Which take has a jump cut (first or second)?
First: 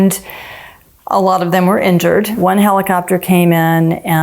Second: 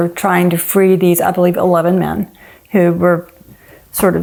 first